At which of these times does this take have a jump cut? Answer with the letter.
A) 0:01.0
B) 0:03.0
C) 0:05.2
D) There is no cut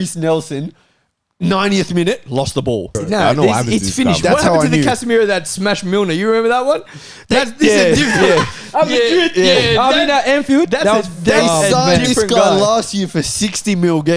B